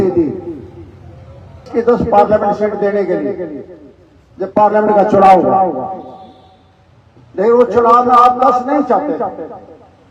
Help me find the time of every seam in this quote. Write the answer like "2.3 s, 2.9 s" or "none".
1.7 s